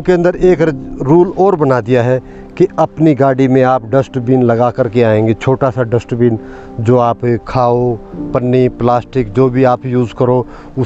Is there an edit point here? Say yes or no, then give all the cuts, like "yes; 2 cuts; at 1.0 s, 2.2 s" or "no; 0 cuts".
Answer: no; 0 cuts